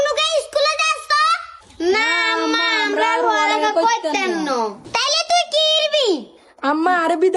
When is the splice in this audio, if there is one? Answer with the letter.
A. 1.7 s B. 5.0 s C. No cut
C